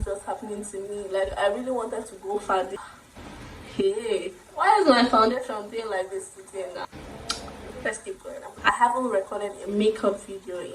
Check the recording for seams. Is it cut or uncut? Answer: cut